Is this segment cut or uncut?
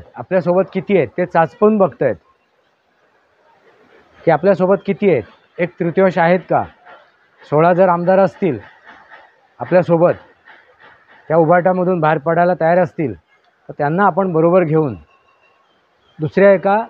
uncut